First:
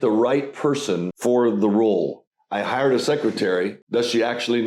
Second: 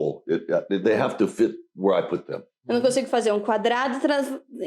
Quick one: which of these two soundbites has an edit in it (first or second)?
first